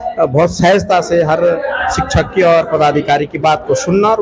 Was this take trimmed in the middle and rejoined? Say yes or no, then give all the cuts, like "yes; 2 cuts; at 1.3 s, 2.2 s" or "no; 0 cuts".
no; 0 cuts